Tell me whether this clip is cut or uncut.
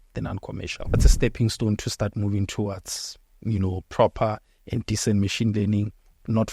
cut